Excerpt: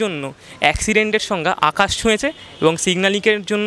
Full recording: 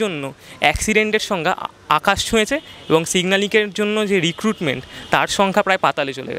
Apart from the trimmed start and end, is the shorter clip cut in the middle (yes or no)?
yes